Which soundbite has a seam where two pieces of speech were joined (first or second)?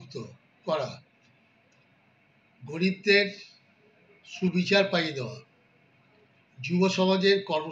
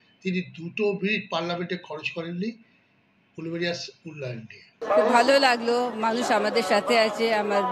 second